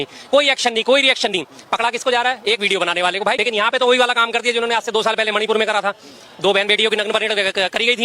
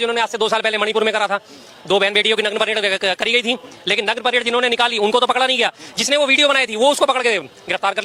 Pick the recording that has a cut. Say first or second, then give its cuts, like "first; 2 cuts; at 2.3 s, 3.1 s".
first; 1 cut; at 3.4 s